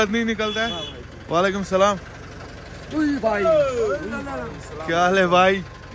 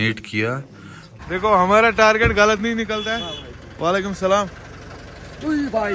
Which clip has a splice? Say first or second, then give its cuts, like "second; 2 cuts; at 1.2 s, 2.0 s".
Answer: second; 1 cut; at 1.2 s